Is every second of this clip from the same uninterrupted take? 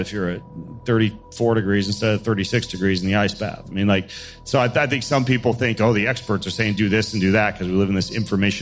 yes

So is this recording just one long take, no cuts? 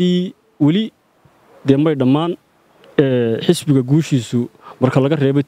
yes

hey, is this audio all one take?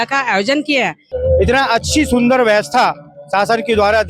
no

